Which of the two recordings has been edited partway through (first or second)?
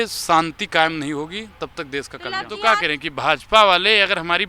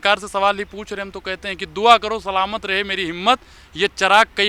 first